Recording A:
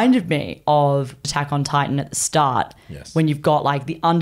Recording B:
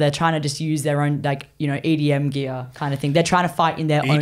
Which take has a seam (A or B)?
A